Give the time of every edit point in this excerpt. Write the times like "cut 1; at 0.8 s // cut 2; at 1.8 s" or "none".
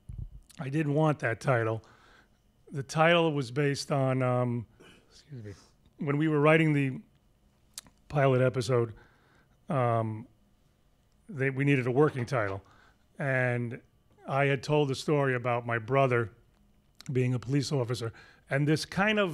none